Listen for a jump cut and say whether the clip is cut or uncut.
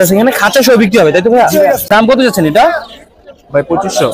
cut